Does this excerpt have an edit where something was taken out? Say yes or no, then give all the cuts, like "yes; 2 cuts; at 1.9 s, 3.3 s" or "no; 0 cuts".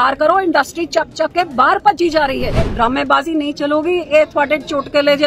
yes; 1 cut; at 2.7 s